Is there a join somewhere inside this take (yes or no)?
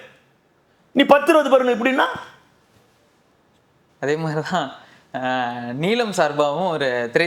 no